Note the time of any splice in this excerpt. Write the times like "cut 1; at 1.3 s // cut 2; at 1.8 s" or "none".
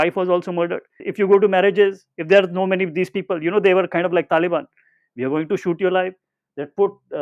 cut 1; at 1.1 s